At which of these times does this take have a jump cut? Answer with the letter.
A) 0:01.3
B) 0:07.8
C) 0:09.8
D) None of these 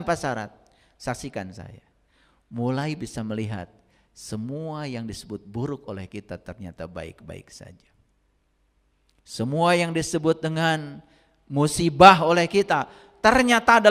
D